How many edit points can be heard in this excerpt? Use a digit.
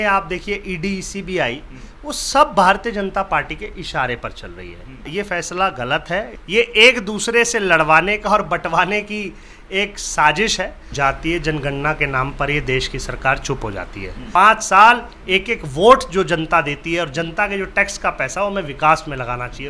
4